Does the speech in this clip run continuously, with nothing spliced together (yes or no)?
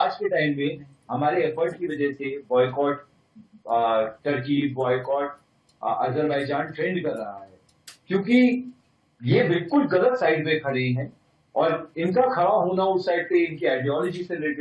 yes